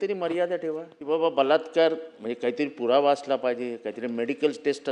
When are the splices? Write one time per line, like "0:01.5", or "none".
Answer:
0:00.9

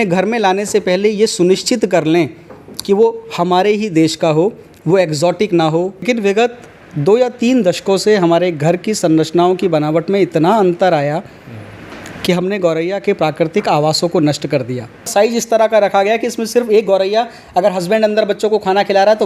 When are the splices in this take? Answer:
0:06.0
0:15.1

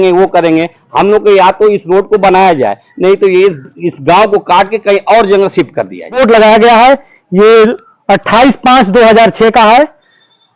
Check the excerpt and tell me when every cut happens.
0:06.1

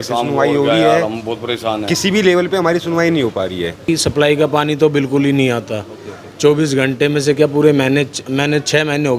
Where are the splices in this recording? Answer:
0:03.8

